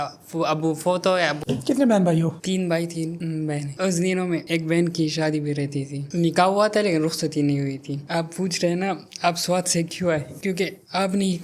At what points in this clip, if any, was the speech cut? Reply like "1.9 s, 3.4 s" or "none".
none